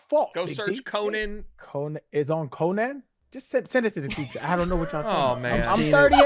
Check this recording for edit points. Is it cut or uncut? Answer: cut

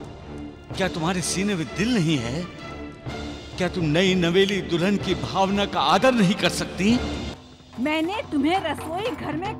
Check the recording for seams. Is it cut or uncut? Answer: cut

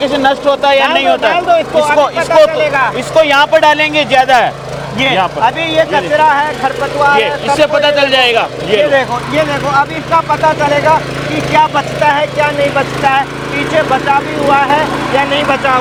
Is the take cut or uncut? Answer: uncut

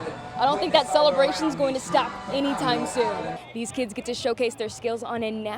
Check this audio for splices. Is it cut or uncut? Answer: cut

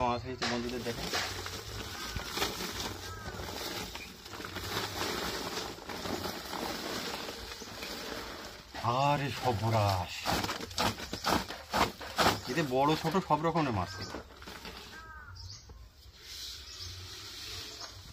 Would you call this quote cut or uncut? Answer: uncut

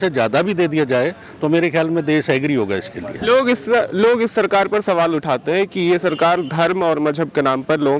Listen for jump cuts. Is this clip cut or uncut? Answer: uncut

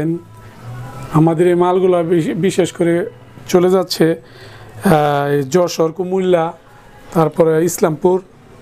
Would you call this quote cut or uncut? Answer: uncut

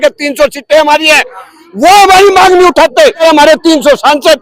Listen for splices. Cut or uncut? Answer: cut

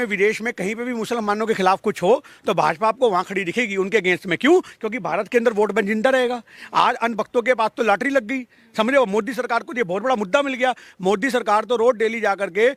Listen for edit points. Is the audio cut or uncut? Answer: uncut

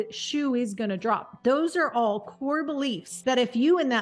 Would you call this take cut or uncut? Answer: cut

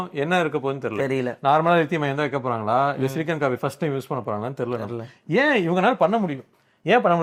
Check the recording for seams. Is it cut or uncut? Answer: uncut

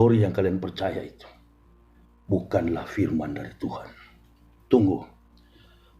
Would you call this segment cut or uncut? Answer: uncut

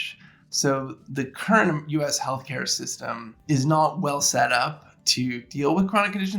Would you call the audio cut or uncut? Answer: cut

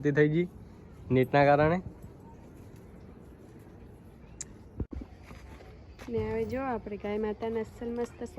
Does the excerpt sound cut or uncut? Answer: cut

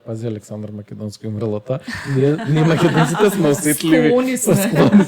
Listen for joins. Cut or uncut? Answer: uncut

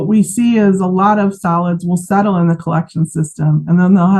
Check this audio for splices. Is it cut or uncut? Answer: uncut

